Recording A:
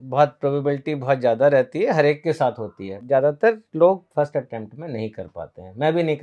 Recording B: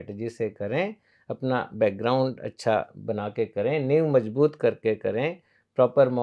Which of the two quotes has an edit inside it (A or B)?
A